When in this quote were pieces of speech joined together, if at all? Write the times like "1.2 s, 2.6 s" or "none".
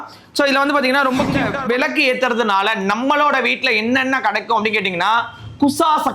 1.5 s